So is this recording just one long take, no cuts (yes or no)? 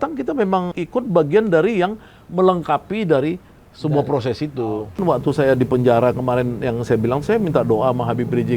no